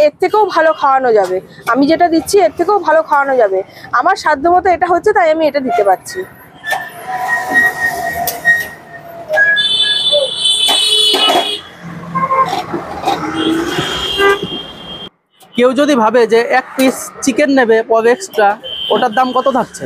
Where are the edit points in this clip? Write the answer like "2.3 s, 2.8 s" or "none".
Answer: none